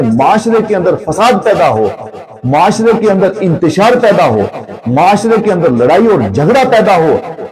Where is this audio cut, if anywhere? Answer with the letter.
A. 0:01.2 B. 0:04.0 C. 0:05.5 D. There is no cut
D